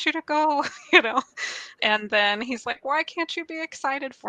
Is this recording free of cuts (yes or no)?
no